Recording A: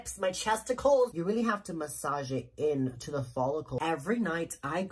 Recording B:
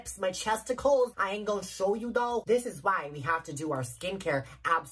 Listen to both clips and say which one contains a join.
A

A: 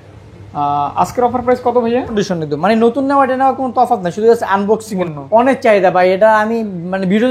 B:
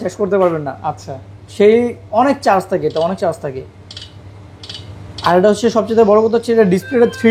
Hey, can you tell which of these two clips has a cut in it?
A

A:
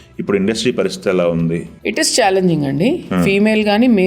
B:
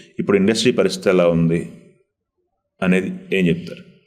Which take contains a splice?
A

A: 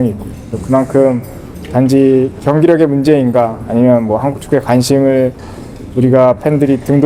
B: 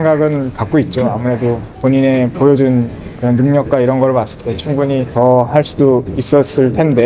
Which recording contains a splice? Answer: B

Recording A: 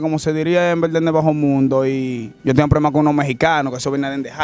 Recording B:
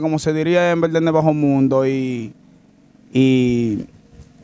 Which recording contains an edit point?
A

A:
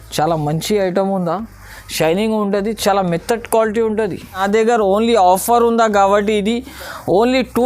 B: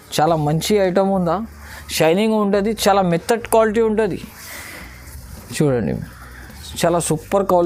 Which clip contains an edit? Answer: A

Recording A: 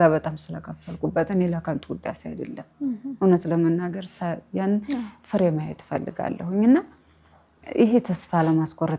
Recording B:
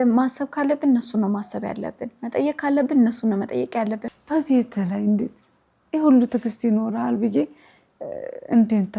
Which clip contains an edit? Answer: B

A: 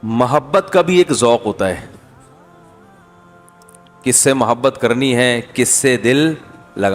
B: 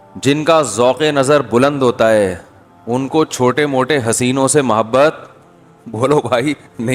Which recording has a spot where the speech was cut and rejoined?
A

